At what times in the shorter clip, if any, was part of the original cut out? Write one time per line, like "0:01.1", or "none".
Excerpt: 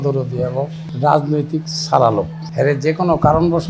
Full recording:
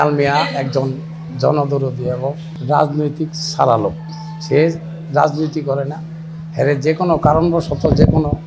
0:02.4